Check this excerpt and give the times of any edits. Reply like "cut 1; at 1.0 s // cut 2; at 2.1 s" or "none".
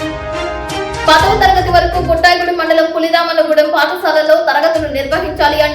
cut 1; at 1.1 s